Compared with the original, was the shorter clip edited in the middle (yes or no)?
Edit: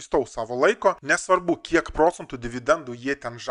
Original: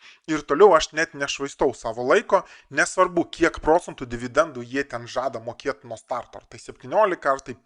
yes